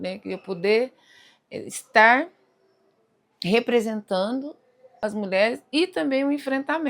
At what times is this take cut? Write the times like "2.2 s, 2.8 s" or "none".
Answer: 4.9 s